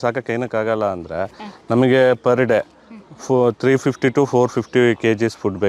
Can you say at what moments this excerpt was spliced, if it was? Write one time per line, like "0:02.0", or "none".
none